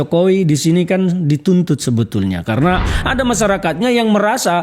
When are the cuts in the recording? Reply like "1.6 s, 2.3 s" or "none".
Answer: 2.8 s